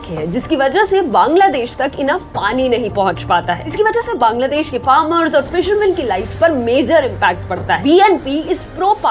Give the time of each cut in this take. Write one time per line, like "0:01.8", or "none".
0:03.7
0:07.7